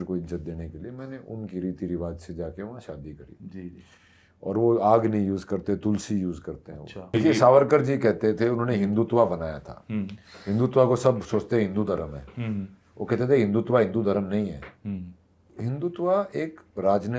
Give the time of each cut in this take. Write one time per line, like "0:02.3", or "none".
0:07.1
0:15.4